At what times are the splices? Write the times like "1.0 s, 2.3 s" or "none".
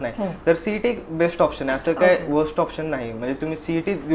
none